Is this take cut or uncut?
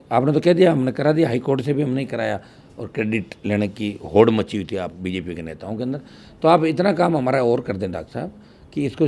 uncut